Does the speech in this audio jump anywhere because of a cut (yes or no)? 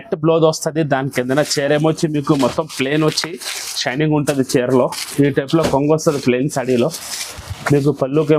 no